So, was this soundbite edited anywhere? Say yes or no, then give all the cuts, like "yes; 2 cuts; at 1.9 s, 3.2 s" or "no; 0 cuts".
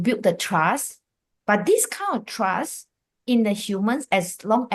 no; 0 cuts